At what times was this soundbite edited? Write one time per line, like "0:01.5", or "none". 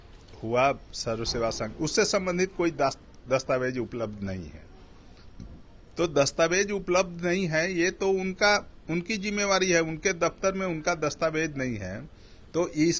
none